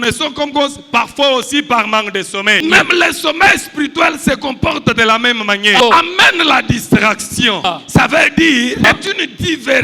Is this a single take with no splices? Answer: no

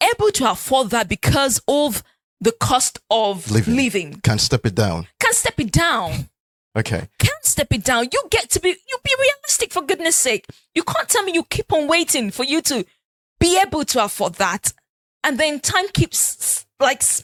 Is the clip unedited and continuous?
yes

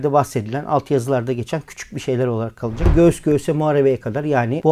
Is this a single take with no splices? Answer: no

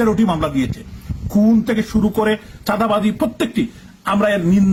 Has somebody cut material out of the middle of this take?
no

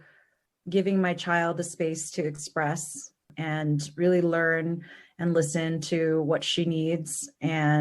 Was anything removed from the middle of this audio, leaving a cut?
yes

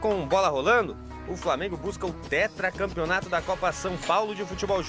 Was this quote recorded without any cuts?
yes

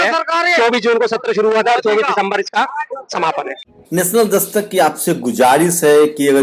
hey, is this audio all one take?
yes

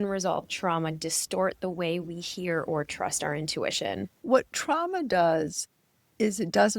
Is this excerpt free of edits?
no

